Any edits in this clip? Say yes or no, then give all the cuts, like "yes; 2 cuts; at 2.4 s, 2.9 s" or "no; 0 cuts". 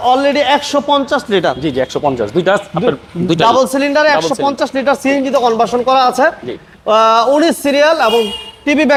no; 0 cuts